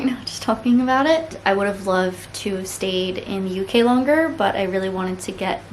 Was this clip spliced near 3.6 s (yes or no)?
no